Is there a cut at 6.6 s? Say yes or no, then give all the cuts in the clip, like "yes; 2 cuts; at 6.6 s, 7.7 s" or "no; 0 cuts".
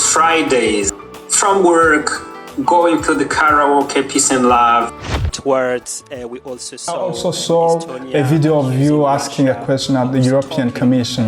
no; 2 cuts; at 1.0 s, 4.9 s